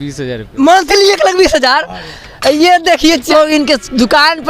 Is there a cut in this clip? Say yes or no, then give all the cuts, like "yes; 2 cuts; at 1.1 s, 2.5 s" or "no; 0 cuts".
yes; 1 cut; at 3.3 s